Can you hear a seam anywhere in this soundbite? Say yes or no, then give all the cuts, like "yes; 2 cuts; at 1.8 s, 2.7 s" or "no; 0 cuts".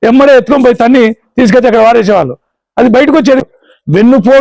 yes; 1 cut; at 3.4 s